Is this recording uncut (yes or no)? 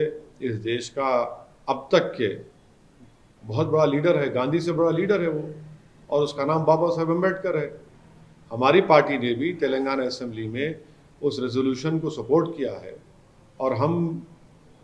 yes